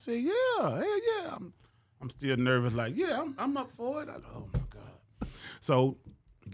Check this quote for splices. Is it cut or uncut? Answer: uncut